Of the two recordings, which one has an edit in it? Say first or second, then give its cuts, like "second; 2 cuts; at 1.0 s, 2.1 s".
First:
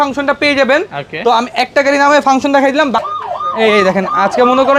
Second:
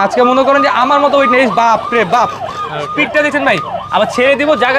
first; 1 cut; at 3.1 s